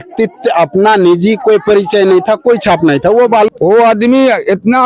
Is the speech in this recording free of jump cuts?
no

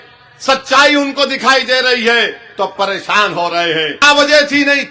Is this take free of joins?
no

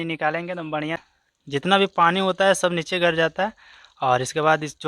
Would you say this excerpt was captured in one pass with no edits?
no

